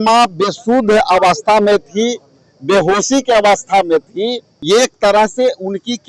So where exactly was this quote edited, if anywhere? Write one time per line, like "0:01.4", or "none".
0:04.5